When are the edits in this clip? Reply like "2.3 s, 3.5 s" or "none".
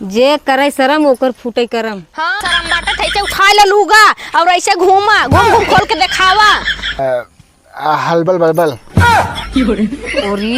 2.3 s, 7.0 s

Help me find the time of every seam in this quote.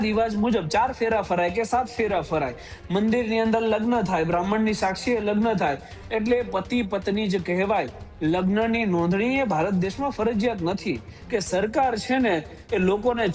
11.1 s

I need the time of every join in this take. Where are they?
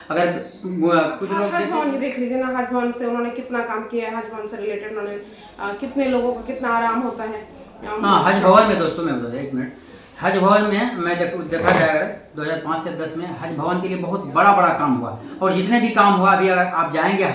1.5 s

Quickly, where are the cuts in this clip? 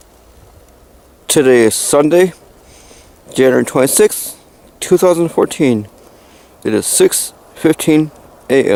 none

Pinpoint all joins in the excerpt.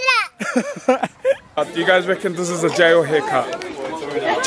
1.5 s

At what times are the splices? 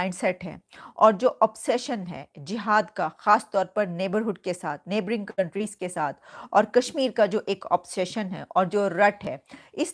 none

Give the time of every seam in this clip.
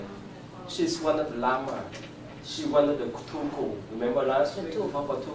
3.1 s

